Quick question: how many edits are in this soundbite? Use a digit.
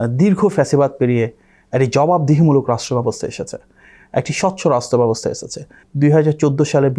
1